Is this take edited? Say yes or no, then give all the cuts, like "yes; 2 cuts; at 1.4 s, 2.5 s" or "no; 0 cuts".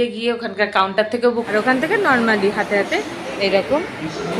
yes; 1 cut; at 1.5 s